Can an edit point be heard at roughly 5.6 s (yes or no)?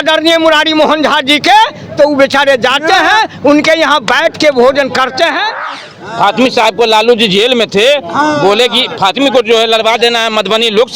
yes